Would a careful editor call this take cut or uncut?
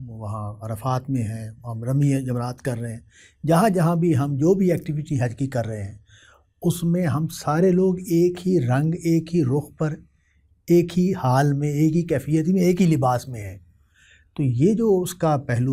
uncut